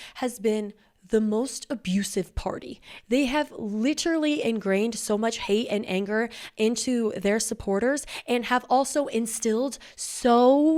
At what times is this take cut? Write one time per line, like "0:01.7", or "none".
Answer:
none